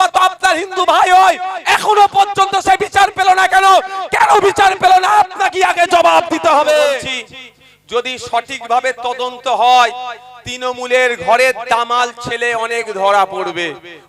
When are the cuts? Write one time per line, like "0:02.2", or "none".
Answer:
0:07.0